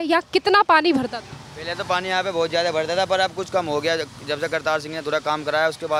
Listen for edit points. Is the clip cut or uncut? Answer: uncut